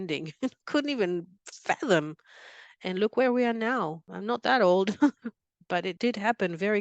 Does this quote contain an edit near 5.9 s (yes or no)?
yes